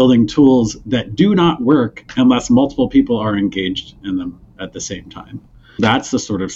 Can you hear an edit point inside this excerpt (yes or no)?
yes